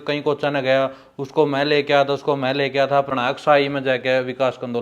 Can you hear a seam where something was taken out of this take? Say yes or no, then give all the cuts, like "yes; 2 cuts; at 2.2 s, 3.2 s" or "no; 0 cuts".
yes; 1 cut; at 3.1 s